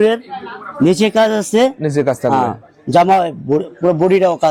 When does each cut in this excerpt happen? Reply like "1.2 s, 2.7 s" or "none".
none